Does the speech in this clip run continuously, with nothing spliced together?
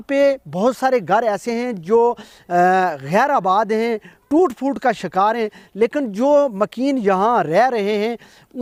yes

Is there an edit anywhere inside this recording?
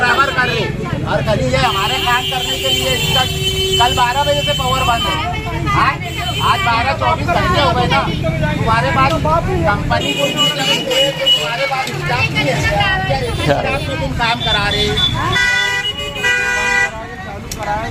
no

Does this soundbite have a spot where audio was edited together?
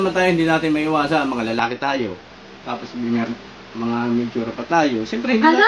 no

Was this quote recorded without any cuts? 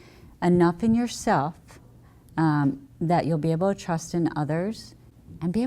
yes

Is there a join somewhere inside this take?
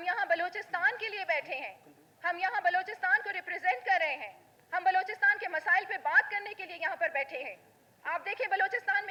no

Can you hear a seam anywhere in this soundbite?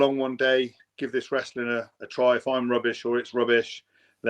no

